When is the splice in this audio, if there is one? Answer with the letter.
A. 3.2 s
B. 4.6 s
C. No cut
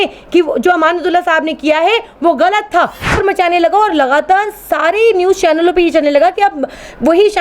A